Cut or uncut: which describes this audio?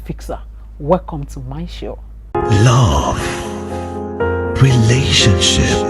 cut